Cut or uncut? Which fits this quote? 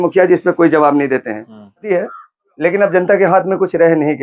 cut